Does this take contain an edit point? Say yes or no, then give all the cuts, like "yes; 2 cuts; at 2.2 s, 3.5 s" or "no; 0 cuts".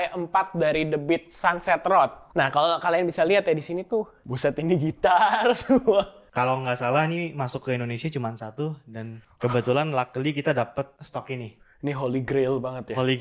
yes; 5 cuts; at 2.2 s, 4.2 s, 6.2 s, 9.2 s, 11.0 s